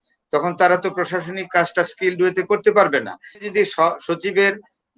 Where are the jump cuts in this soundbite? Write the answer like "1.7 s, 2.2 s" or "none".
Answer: 3.4 s